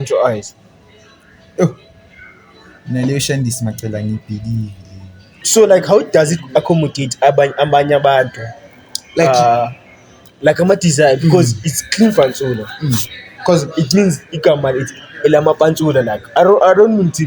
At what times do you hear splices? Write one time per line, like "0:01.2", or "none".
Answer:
0:05.4